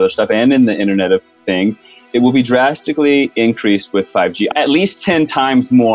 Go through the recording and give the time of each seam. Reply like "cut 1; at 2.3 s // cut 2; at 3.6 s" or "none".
cut 1; at 4.5 s